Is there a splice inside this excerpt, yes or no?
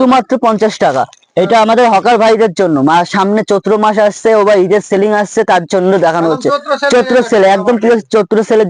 no